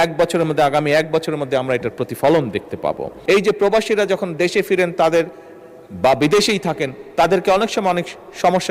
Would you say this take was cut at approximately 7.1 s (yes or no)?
no